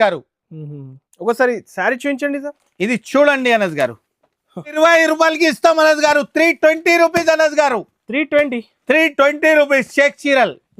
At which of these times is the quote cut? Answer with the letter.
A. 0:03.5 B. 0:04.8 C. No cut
B